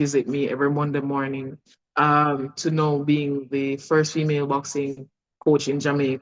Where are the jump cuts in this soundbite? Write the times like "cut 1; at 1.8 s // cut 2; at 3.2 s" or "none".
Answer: none